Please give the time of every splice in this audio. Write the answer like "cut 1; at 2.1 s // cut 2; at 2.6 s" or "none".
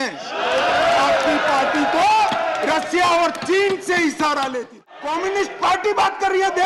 cut 1; at 4.9 s